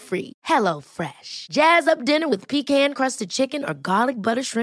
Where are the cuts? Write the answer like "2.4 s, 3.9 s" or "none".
none